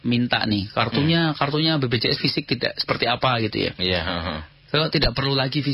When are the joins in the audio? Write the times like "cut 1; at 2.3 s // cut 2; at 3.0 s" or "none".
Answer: none